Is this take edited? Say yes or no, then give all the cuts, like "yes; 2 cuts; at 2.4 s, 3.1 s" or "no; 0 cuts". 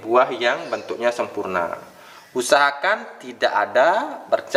no; 0 cuts